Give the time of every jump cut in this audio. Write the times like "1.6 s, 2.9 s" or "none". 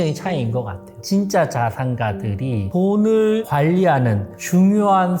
1.0 s, 2.6 s, 3.5 s